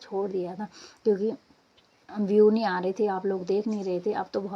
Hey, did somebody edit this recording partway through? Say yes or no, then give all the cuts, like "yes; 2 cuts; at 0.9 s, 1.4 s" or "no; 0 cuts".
no; 0 cuts